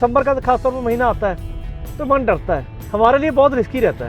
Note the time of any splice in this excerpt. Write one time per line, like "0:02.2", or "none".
0:02.8